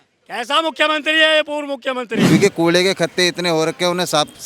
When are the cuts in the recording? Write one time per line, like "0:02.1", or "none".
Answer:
0:02.2